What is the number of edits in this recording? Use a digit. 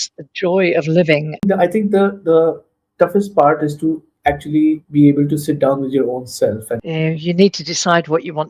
2